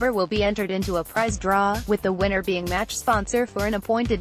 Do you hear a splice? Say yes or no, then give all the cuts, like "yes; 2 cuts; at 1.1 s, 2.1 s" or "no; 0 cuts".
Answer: no; 0 cuts